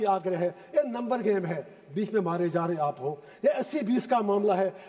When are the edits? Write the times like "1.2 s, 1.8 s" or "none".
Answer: none